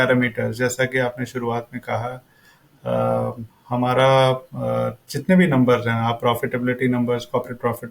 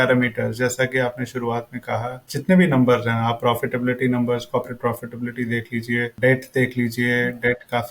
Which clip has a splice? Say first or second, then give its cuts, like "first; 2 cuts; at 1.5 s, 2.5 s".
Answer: second; 2 cuts; at 2.3 s, 6.1 s